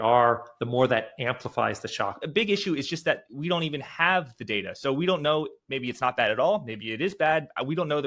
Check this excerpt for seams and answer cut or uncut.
cut